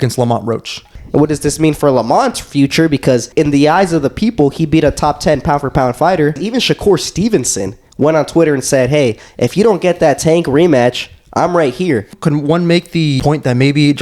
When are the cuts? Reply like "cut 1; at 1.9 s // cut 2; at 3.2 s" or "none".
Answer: cut 1; at 0.9 s // cut 2; at 3.3 s // cut 3; at 6.4 s // cut 4; at 12.1 s // cut 5; at 13.2 s